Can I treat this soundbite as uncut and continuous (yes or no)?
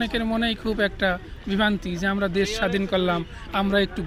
yes